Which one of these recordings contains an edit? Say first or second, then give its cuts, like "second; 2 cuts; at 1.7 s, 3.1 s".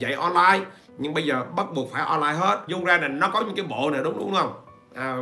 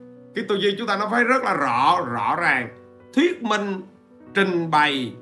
first; 1 cut; at 2.7 s